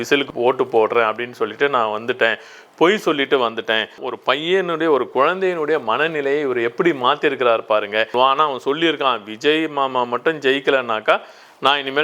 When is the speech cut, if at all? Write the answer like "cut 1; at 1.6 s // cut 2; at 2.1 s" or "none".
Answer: cut 1; at 4.0 s // cut 2; at 8.1 s